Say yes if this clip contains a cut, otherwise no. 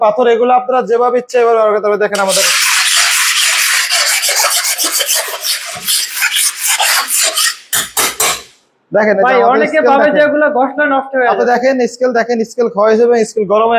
no